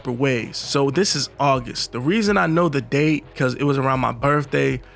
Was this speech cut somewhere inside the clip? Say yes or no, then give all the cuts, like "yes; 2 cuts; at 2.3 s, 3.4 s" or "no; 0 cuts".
no; 0 cuts